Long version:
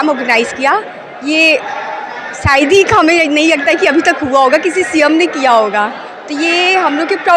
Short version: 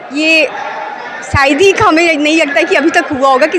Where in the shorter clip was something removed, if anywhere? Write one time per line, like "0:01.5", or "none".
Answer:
none